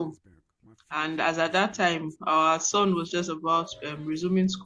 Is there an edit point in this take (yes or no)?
no